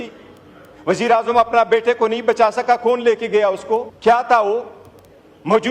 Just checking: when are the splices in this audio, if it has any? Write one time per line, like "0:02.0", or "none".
0:03.9